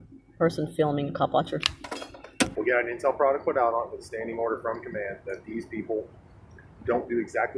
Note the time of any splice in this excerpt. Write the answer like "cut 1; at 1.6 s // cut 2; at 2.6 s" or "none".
cut 1; at 2.5 s